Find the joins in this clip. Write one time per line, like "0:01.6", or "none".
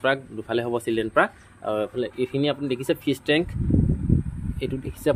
none